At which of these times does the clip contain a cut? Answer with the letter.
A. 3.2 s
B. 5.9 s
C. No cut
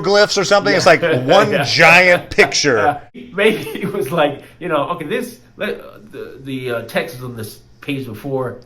A